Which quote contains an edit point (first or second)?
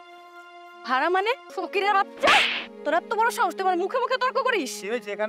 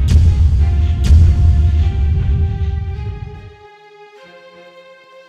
first